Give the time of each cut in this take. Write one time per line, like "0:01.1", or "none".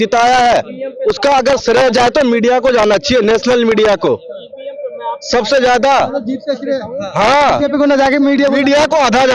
none